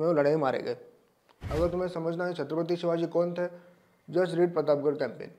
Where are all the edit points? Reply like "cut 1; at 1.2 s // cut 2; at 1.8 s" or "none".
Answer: cut 1; at 1.4 s